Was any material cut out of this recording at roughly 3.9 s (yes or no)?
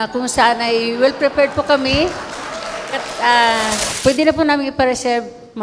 yes